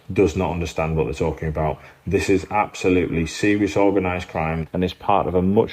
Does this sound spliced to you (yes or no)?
yes